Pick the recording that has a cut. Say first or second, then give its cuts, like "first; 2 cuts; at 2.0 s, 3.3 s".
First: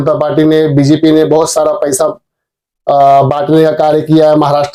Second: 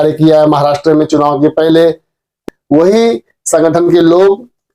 second; 1 cut; at 2.5 s